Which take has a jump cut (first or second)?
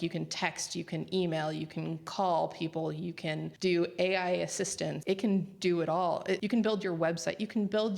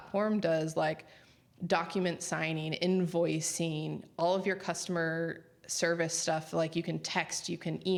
first